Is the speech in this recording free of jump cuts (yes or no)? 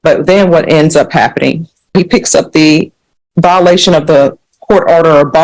no